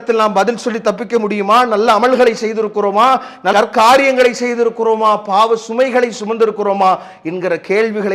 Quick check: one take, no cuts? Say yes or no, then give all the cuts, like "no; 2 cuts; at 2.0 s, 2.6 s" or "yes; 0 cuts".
yes; 0 cuts